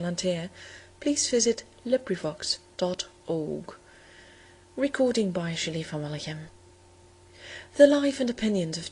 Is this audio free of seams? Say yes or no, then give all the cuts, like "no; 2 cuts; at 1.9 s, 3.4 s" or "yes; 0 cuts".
no; 1 cut; at 6.1 s